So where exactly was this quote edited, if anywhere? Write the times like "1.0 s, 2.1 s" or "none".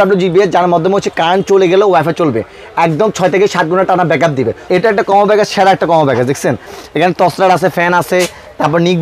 4.6 s